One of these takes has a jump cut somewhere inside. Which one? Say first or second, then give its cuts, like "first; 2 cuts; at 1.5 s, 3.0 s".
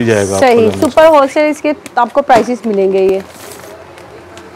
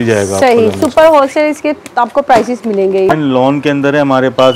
second; 1 cut; at 3.1 s